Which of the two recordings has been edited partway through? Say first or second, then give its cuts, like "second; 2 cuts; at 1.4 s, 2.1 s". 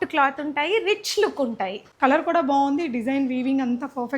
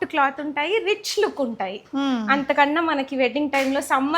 first; 1 cut; at 1.8 s